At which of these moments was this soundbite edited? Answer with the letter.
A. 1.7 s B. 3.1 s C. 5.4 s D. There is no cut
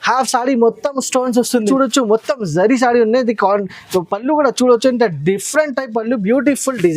A